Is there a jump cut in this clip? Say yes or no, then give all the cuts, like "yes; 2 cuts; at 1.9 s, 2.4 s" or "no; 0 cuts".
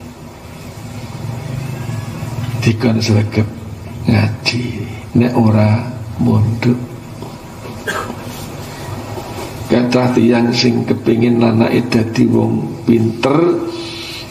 no; 0 cuts